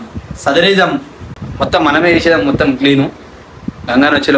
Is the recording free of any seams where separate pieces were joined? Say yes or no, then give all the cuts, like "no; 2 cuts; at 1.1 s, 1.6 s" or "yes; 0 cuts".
yes; 0 cuts